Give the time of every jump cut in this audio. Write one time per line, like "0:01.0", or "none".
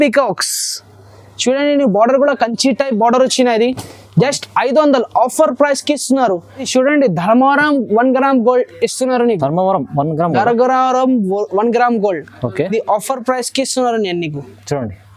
0:06.5